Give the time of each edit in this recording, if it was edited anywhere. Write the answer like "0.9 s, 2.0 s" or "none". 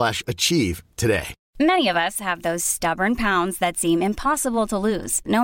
1.4 s